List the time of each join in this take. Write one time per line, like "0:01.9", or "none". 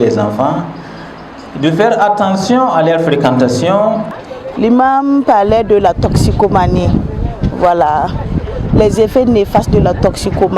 0:04.2